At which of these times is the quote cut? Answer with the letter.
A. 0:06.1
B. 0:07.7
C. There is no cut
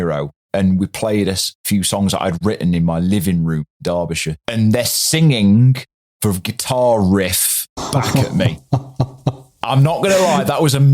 B